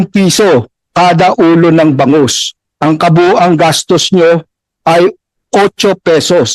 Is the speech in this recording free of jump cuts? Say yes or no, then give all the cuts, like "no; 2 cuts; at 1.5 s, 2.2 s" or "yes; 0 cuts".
yes; 0 cuts